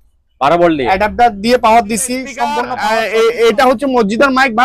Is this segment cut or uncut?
cut